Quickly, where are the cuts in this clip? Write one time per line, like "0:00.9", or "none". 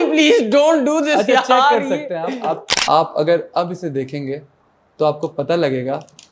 0:02.7